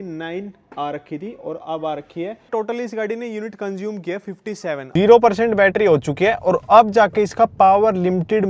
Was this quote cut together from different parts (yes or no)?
yes